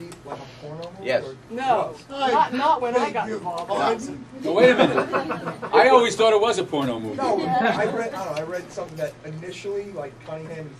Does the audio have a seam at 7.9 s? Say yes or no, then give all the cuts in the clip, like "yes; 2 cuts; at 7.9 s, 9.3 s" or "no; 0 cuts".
yes; 1 cut; at 7.9 s